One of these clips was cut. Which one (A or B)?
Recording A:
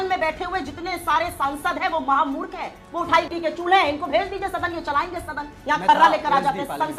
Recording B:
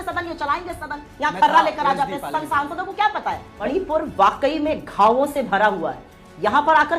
B